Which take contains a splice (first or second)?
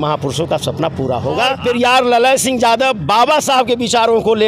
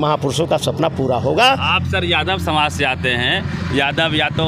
first